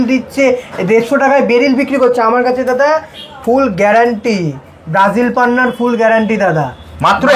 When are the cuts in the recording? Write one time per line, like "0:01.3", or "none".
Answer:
none